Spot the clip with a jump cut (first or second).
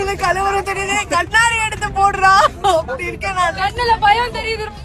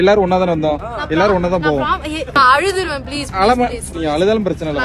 second